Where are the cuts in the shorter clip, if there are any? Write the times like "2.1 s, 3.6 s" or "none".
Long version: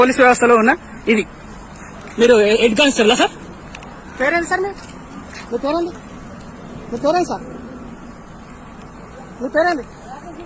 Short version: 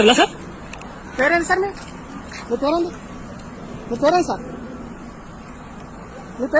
none